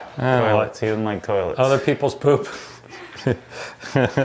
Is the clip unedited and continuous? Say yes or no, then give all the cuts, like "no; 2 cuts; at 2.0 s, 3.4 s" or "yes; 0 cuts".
yes; 0 cuts